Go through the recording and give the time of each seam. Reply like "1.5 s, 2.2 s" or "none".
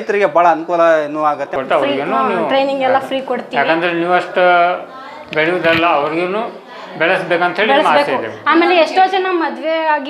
1.5 s